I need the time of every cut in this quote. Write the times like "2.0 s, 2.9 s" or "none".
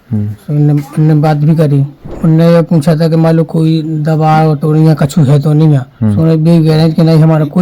2.1 s